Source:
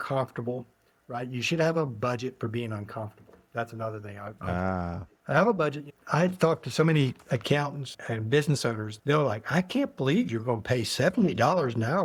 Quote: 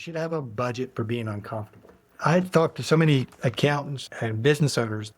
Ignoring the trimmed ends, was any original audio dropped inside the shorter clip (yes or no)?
yes